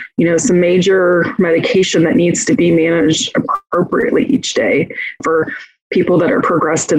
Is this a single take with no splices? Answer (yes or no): no